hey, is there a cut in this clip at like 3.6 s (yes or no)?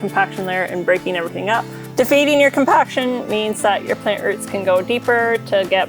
no